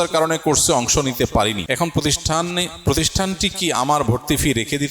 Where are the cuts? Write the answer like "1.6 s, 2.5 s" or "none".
1.6 s